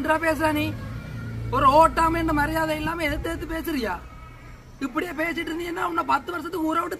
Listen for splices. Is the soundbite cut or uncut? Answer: uncut